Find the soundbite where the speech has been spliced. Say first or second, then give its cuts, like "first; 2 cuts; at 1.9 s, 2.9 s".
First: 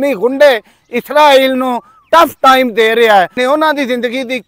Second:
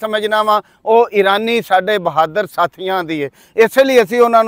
first; 1 cut; at 3.3 s